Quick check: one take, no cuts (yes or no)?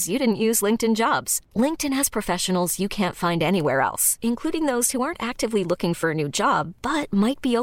yes